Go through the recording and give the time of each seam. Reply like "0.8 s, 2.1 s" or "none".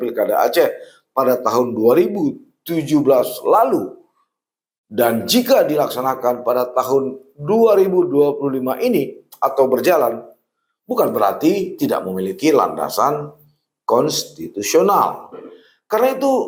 none